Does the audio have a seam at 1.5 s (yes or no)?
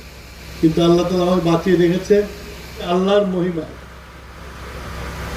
no